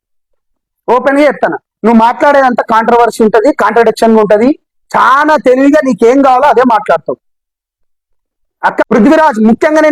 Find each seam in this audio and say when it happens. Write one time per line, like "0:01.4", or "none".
0:08.9